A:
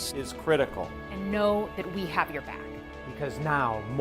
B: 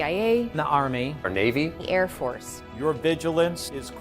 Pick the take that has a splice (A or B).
B